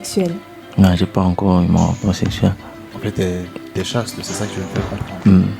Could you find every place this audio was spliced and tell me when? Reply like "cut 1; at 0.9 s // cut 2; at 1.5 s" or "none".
cut 1; at 2.8 s